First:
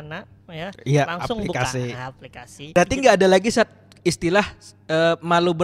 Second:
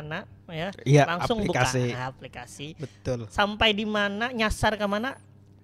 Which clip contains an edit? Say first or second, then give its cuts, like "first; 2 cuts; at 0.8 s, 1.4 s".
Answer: first; 1 cut; at 2.8 s